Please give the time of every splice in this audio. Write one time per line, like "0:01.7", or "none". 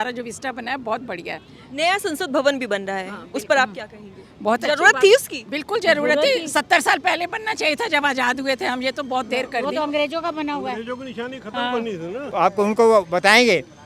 0:12.2